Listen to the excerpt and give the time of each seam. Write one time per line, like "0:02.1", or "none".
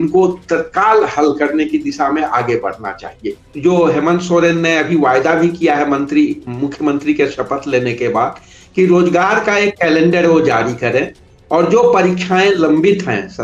0:03.5